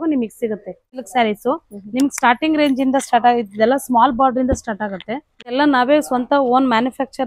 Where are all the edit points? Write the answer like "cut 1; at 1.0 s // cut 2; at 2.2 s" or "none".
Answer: cut 1; at 1.0 s // cut 2; at 5.5 s